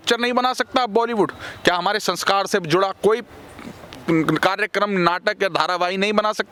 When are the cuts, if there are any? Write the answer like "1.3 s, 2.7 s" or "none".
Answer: none